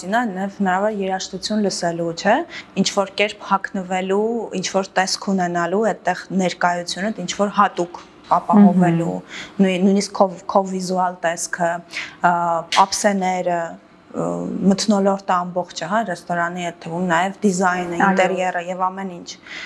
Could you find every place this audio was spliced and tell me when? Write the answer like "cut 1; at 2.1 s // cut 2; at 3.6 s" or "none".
none